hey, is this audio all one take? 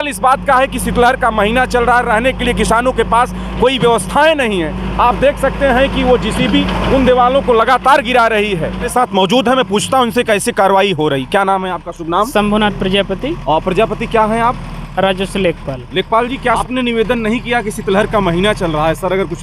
no; 2 cuts; at 8.9 s, 16.6 s

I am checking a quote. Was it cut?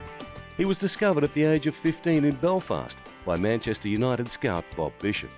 no; 0 cuts

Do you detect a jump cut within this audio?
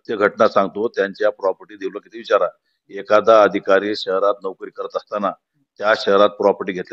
no; 0 cuts

